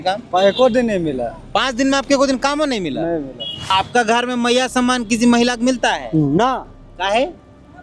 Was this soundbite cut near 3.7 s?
yes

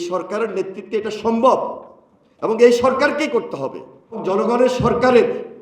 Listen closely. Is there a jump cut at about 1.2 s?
no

